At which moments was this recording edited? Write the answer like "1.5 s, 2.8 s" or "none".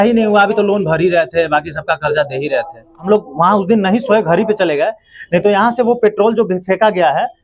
3.1 s